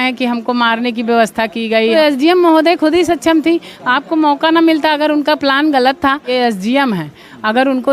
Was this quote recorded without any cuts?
no; 2 cuts; at 1.9 s, 6.3 s

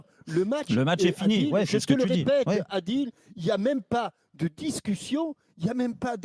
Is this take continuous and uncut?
yes; 0 cuts

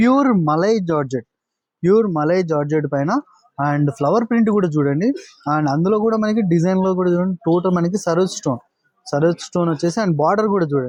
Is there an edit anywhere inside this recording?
no; 0 cuts

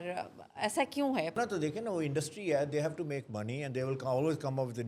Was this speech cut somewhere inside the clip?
yes; 1 cut; at 1.4 s

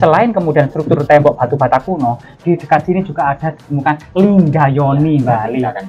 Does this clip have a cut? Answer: no; 0 cuts

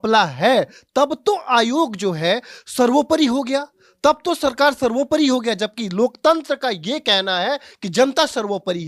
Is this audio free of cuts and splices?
yes; 0 cuts

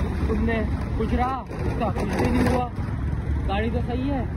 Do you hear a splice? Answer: no; 0 cuts

